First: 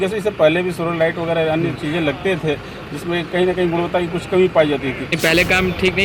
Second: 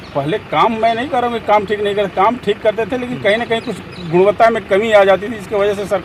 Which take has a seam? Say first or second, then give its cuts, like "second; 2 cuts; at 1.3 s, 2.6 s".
first; 1 cut; at 5.1 s